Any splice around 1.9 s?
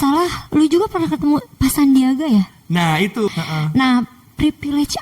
no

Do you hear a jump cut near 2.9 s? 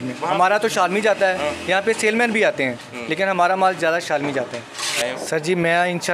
no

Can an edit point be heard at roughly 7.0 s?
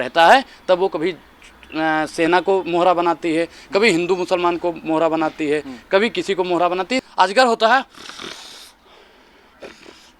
yes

